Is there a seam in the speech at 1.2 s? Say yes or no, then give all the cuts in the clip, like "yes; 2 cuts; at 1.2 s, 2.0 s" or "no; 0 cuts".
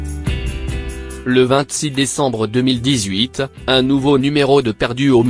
yes; 1 cut; at 1.2 s